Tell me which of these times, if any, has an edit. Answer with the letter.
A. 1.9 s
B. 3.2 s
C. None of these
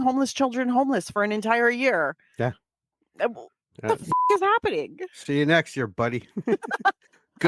C